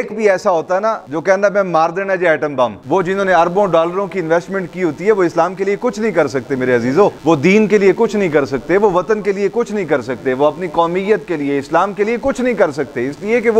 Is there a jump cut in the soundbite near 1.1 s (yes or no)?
yes